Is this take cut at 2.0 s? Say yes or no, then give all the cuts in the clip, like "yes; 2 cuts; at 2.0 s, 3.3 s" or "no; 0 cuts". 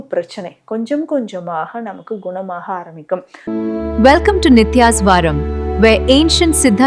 no; 1 cut; at 3.3 s